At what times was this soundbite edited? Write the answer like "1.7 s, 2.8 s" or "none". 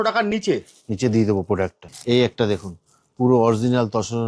1.9 s